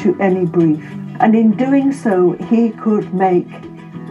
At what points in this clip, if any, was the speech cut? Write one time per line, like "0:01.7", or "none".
0:01.0